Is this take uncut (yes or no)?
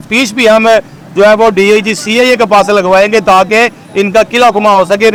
yes